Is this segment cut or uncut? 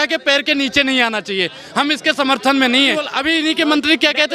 cut